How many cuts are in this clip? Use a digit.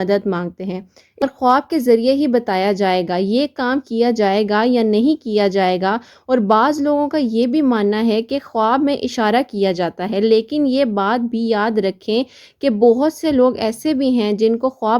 1